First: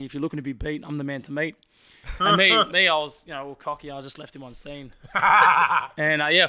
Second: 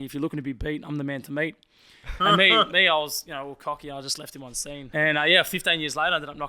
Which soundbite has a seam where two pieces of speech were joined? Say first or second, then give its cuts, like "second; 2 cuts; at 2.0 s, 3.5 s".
second; 1 cut; at 4.9 s